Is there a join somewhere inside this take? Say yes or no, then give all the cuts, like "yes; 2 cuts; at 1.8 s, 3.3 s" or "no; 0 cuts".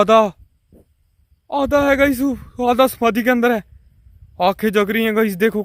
no; 0 cuts